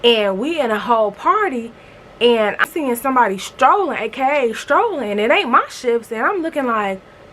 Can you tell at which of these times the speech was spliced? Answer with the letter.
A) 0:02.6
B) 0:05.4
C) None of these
A